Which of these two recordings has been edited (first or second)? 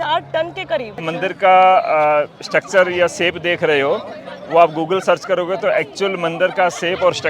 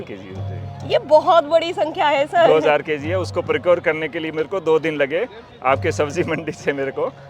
first